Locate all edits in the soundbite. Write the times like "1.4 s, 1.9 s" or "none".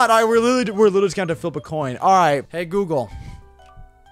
2.5 s